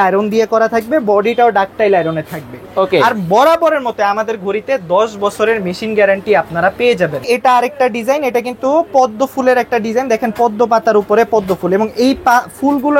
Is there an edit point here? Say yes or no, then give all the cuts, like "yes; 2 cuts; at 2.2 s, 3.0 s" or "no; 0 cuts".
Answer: yes; 1 cut; at 7.2 s